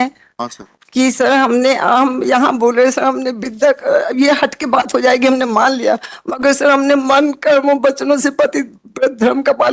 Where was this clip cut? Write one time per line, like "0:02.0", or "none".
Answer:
none